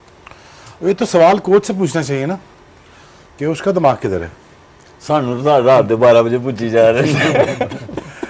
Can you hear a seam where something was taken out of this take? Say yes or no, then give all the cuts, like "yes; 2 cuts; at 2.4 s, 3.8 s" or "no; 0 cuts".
no; 0 cuts